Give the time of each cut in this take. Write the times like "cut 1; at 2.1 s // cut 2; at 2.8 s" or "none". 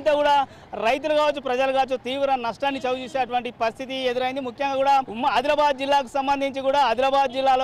cut 1; at 5.1 s